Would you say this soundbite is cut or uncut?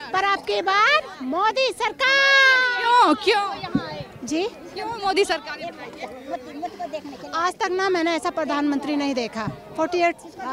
uncut